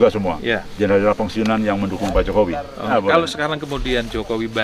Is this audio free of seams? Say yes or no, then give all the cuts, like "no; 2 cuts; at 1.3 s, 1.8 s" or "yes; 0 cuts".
no; 1 cut; at 2.9 s